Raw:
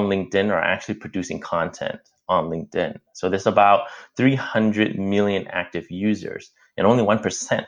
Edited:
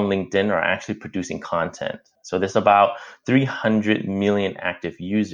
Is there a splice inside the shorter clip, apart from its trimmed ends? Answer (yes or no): yes